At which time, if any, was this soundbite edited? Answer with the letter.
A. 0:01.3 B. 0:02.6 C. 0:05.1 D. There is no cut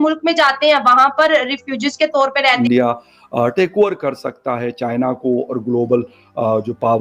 B